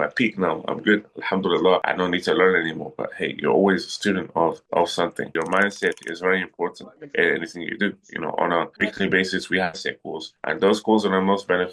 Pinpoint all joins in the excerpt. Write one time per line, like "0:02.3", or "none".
0:01.8
0:05.3